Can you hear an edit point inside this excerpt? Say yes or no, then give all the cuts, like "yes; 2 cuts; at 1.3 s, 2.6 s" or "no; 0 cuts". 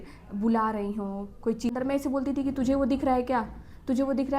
yes; 1 cut; at 1.7 s